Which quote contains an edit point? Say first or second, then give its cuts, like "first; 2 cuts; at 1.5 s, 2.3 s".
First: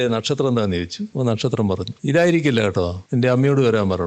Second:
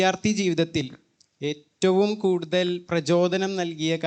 first; 3 cuts; at 1.0 s, 1.9 s, 3.0 s